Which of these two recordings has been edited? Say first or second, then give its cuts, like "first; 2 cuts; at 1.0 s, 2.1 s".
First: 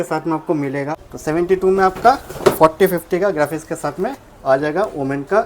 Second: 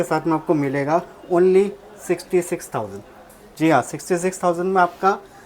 first; 1 cut; at 0.9 s